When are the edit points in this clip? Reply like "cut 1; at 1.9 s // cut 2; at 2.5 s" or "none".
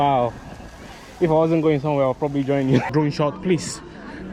cut 1; at 2.9 s